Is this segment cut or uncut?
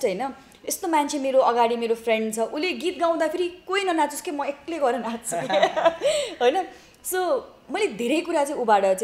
uncut